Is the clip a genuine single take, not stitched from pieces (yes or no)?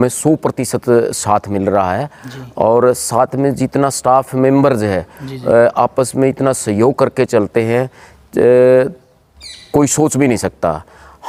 yes